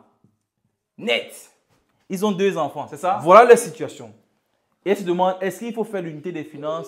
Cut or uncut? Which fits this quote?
cut